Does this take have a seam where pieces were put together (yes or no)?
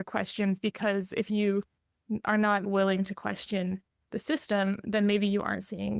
yes